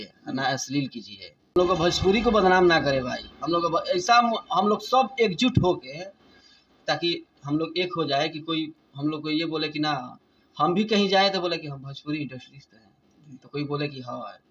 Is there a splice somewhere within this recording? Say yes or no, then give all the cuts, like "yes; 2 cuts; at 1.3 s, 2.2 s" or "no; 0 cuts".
yes; 1 cut; at 1.6 s